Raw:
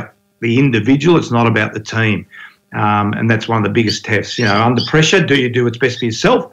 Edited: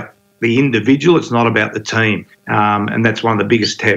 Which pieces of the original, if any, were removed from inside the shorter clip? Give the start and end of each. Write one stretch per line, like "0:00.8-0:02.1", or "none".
0:02.3-0:02.6